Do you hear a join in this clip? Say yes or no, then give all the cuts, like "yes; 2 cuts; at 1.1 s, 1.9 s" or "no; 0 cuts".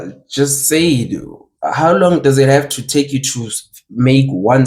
no; 0 cuts